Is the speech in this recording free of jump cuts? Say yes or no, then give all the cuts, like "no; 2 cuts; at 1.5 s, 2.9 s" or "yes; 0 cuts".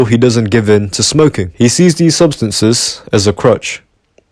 no; 1 cut; at 1.4 s